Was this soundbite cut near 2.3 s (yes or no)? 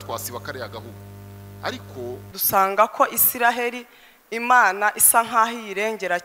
yes